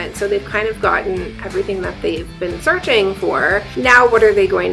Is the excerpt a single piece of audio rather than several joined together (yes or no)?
no